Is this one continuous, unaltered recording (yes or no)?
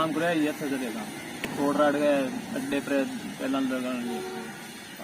no